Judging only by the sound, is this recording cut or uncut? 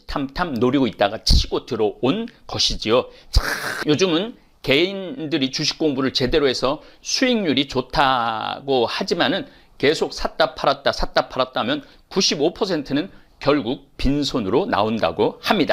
cut